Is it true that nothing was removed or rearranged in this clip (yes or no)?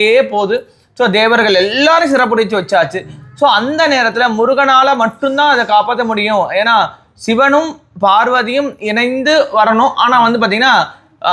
yes